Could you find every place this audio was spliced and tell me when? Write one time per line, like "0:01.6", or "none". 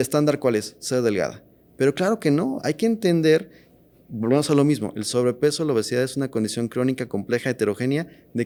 none